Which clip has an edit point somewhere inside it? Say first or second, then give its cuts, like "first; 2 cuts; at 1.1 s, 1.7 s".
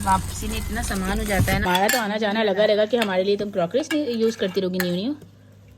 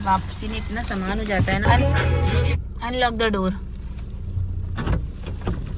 first; 1 cut; at 1.6 s